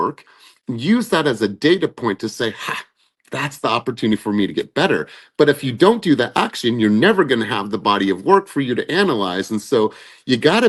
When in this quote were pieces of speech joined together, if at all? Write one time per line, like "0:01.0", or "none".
none